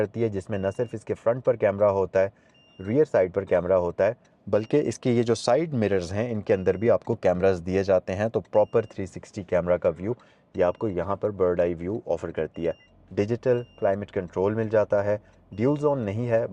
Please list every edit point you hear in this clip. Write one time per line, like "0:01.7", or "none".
0:12.9